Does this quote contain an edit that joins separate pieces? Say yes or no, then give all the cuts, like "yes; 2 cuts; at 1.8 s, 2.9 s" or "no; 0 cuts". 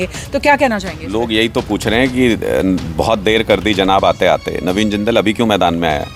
no; 0 cuts